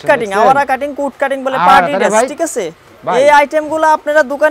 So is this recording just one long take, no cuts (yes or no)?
yes